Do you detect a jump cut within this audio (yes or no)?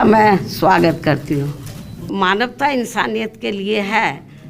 yes